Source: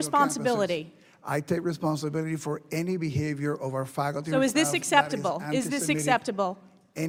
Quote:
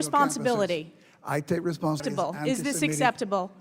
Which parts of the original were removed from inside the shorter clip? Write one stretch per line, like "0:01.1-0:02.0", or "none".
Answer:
0:02.0-0:05.1